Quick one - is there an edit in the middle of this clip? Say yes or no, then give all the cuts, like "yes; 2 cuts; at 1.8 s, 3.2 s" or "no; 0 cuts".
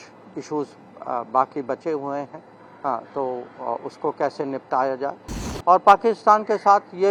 no; 0 cuts